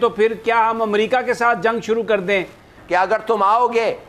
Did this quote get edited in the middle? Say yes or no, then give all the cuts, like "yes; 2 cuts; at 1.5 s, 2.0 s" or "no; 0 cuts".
yes; 1 cut; at 2.7 s